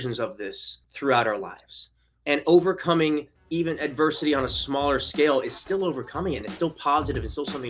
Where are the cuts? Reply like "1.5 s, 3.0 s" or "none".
none